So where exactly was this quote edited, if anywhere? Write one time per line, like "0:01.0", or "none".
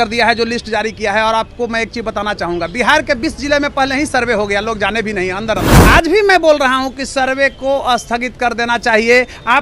0:05.8